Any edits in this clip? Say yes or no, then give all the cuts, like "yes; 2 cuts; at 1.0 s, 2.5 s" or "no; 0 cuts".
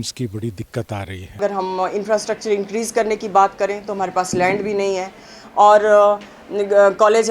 yes; 1 cut; at 1.4 s